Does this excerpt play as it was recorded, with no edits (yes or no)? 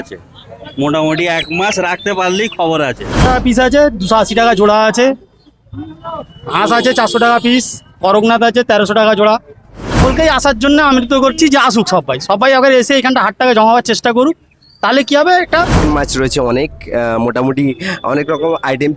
no